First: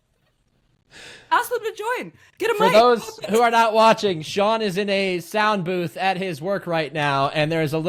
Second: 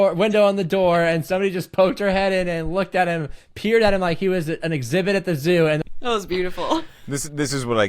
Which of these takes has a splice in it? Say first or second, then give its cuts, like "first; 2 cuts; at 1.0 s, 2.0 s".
second; 1 cut; at 5.9 s